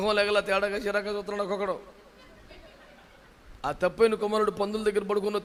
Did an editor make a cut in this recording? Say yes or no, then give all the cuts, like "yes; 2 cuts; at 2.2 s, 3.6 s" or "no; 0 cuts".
no; 0 cuts